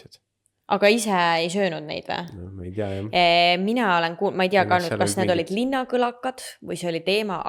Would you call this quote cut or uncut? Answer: uncut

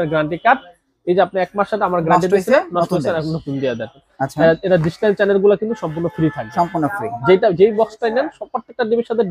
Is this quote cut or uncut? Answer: cut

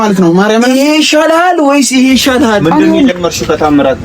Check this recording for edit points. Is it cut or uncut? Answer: cut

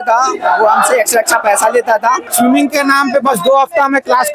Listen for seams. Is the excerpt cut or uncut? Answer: cut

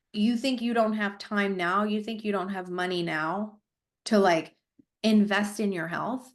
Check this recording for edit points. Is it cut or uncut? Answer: uncut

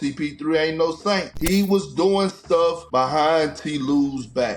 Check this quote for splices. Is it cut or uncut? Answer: cut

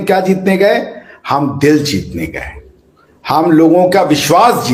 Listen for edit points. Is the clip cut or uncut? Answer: uncut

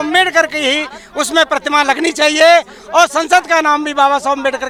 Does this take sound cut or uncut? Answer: uncut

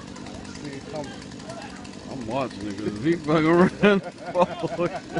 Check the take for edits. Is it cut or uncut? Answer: cut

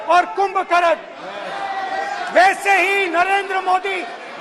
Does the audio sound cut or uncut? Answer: uncut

